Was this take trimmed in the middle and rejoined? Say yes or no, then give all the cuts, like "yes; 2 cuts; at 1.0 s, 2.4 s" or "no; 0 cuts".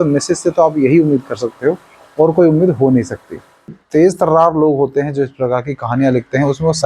yes; 1 cut; at 3.8 s